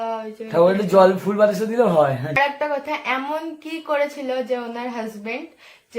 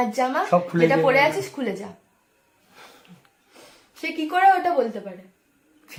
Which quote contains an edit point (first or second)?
first